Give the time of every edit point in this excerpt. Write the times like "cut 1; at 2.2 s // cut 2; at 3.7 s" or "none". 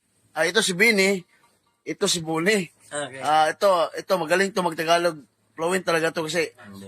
cut 1; at 3.7 s